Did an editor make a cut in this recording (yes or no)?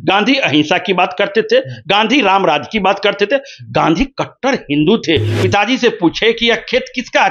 yes